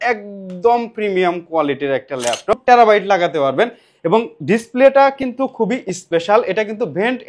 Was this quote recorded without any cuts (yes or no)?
no